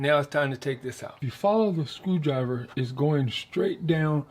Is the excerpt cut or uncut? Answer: cut